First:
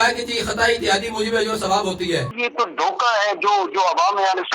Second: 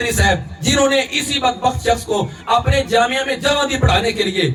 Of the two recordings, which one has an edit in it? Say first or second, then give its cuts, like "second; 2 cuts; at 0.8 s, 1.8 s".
first; 1 cut; at 2.3 s